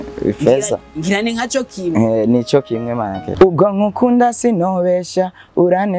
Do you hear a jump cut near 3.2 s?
yes; 1 cut; at 3.2 s

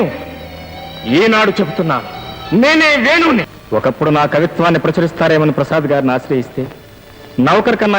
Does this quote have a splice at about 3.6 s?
yes; 1 cut; at 3.6 s

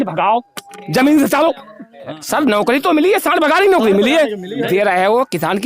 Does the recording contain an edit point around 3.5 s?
no; 2 cuts; at 2.2 s, 4.7 s

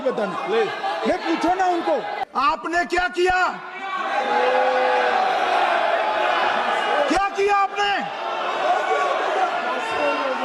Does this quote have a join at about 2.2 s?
yes; 1 cut; at 2.2 s

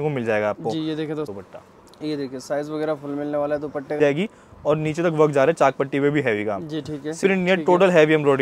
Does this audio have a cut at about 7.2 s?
yes; 3 cuts; at 1.3 s, 4.0 s, 7.2 s

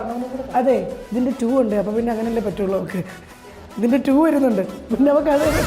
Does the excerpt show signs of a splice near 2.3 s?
no; 1 cut; at 1.0 s

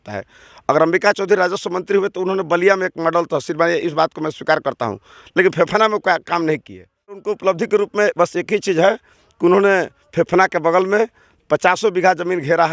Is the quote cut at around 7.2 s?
yes; 1 cut; at 7.2 s

